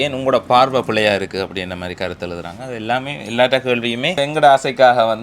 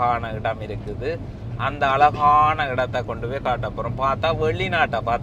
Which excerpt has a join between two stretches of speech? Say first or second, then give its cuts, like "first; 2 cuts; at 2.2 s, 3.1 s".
first; 1 cut; at 4.2 s